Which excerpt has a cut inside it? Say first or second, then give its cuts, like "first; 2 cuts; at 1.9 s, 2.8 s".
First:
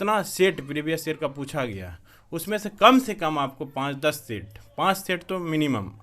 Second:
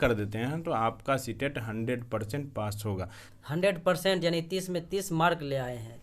second; 1 cut; at 3.2 s